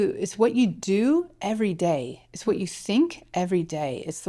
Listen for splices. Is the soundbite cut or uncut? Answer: uncut